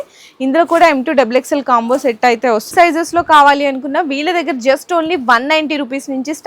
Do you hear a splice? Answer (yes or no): yes